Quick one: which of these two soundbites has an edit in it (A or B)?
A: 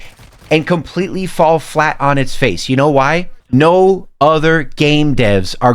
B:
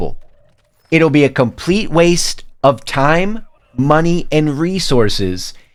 A